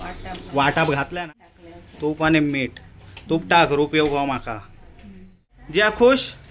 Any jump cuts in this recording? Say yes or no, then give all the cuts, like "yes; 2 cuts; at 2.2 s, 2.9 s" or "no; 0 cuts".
yes; 2 cuts; at 1.1 s, 5.6 s